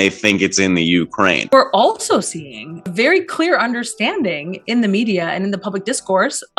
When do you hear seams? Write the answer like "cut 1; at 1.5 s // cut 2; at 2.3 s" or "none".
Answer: cut 1; at 1.5 s // cut 2; at 2.9 s